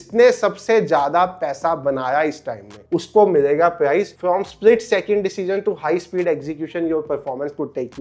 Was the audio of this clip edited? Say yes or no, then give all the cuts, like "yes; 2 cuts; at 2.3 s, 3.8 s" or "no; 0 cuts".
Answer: no; 0 cuts